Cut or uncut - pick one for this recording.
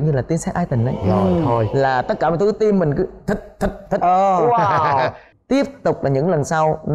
cut